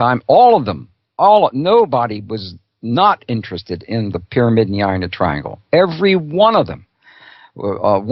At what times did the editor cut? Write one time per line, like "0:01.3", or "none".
none